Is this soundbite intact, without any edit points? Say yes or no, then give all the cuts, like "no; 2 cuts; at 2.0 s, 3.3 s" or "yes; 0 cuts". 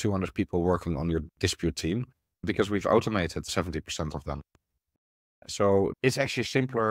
no; 3 cuts; at 2.4 s, 3.5 s, 5.9 s